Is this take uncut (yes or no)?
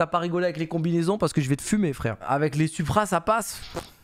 no